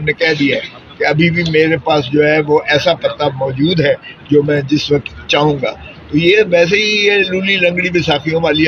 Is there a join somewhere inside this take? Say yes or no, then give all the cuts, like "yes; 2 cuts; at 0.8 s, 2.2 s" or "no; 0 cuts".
no; 0 cuts